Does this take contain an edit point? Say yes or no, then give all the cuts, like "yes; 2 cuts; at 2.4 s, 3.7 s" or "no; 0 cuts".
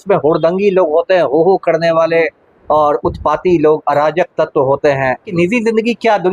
yes; 1 cut; at 5.3 s